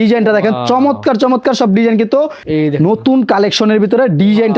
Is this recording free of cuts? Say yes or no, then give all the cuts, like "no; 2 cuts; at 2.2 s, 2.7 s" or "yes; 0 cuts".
no; 1 cut; at 2.4 s